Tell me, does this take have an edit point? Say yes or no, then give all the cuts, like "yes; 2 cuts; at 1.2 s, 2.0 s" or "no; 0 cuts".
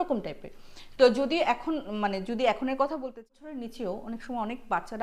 yes; 1 cut; at 3.2 s